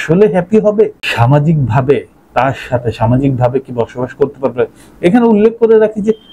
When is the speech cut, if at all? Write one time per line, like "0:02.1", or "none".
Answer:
0:01.0